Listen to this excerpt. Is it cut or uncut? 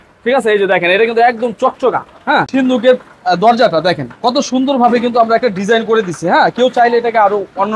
cut